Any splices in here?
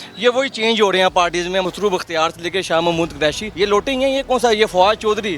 yes; 2 cuts; at 1.6 s, 3.5 s

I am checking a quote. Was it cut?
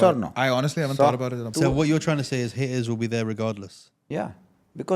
yes; 1 cut; at 1.4 s

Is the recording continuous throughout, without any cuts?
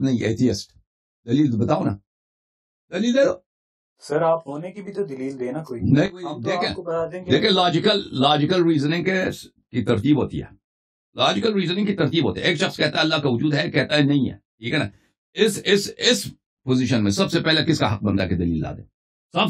yes; 0 cuts

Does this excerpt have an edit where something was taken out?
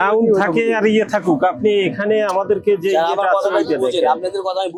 no; 0 cuts

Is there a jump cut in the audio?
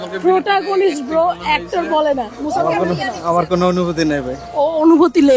yes; 1 cut; at 2.3 s

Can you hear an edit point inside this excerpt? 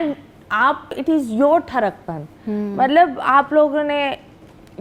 yes; 1 cut; at 1.0 s

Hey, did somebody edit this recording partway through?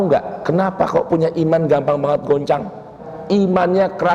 yes; 1 cut; at 3.1 s

